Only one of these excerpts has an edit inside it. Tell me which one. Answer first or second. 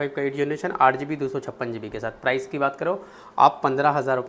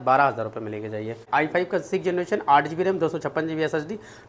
second